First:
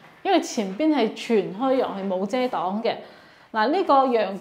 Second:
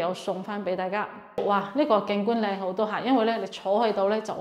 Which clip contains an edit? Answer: second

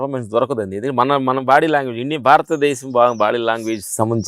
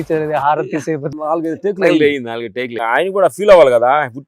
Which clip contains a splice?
second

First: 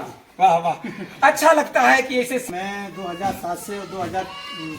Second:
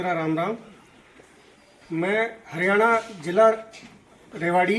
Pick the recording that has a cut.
first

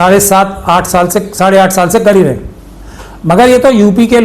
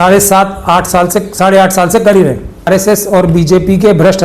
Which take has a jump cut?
second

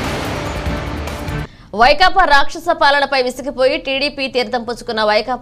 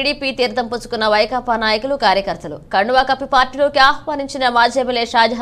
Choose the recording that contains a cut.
first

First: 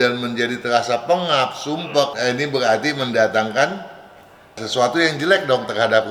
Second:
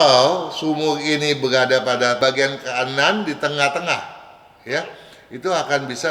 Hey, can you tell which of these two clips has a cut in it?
second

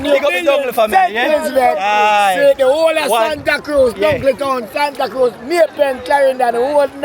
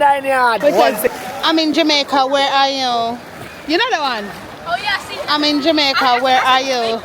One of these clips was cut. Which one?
second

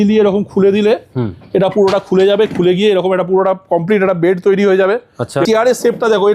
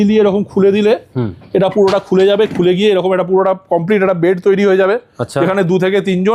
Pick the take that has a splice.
first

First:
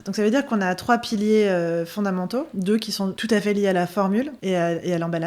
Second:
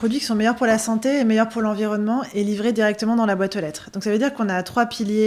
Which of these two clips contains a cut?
first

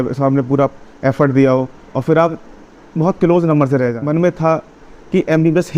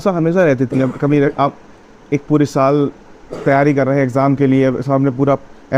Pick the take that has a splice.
first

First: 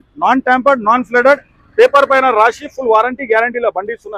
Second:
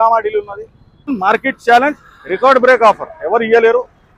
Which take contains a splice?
second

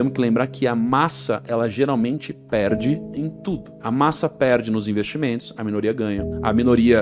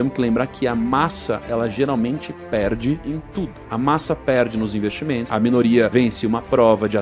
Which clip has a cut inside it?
second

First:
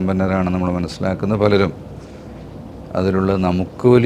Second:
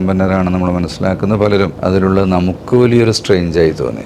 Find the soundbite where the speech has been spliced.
second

